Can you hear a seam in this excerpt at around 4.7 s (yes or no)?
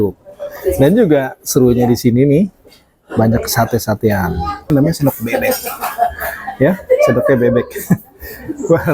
yes